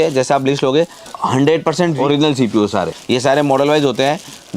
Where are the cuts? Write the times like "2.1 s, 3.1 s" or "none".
1.0 s, 2.0 s, 3.0 s

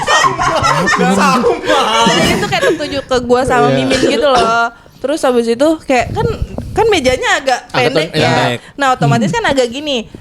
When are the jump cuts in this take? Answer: 2.3 s

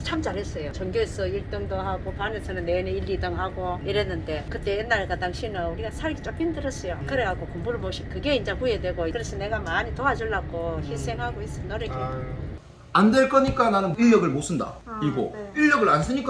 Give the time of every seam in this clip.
12.5 s

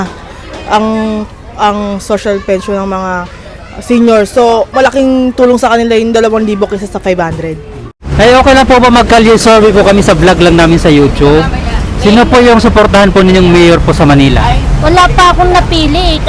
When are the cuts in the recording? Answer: 8.0 s

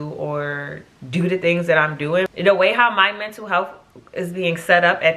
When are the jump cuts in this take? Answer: 2.3 s

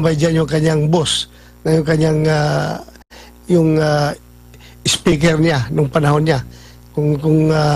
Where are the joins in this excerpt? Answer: none

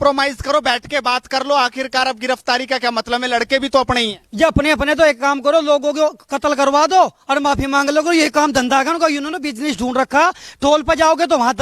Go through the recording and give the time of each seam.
none

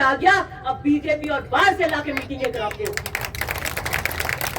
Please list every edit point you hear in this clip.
none

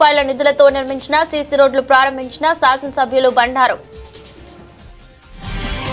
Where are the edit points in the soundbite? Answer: 3.8 s

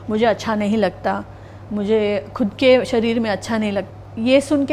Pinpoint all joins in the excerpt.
3.8 s

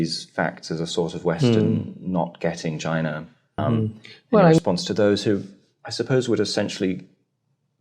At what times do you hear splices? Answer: 4.6 s

